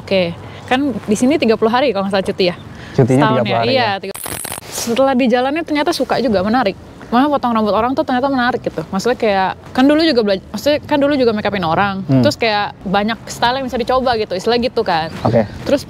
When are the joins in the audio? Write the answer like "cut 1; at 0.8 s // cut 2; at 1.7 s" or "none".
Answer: cut 1; at 4.3 s // cut 2; at 9.6 s // cut 3; at 12.8 s